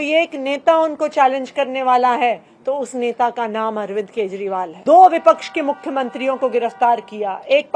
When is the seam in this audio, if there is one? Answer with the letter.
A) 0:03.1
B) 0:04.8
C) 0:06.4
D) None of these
B